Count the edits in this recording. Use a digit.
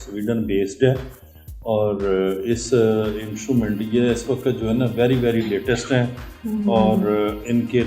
0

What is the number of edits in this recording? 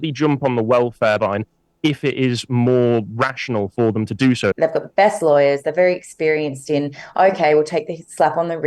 2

